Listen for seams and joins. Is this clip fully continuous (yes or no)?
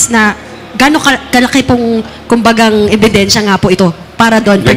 yes